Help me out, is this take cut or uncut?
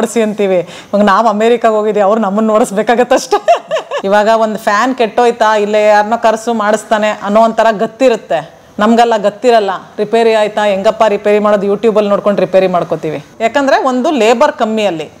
cut